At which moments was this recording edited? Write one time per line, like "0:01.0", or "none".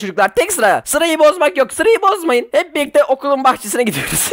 none